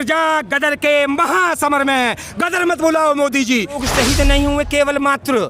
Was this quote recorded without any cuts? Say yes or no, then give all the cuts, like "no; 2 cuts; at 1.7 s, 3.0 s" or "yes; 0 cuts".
no; 1 cut; at 3.8 s